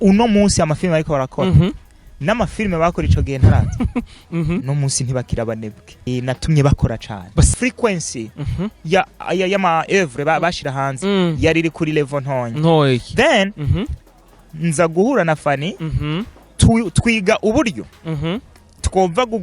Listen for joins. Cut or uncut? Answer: cut